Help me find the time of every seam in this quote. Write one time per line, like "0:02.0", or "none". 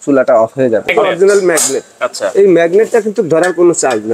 0:00.9